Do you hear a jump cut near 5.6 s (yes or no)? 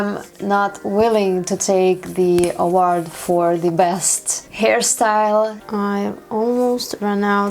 yes